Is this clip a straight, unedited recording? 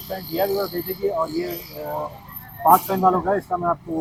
yes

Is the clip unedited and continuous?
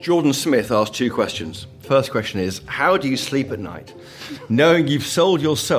no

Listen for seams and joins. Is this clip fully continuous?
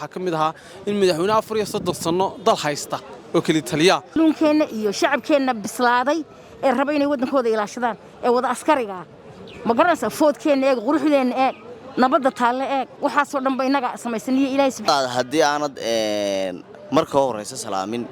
no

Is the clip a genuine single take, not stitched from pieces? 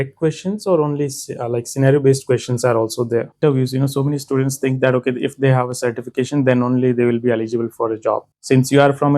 no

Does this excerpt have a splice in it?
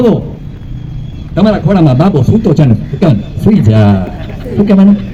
no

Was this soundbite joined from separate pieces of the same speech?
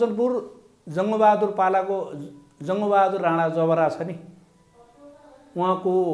no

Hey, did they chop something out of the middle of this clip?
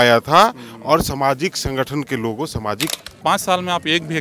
yes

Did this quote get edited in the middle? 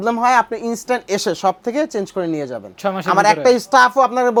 no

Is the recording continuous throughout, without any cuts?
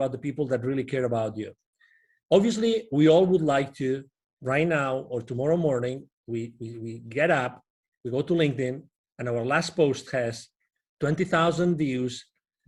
yes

